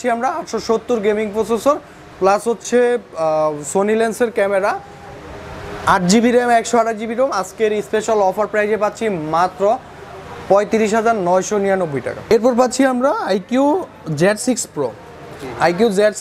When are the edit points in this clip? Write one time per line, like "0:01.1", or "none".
none